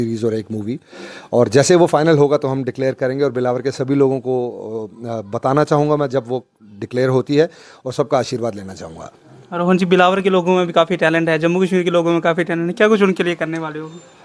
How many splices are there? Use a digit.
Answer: 0